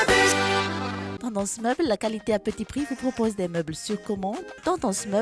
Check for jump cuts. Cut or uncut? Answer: cut